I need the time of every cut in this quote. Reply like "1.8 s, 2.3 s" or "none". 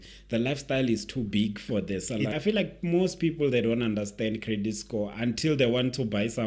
2.4 s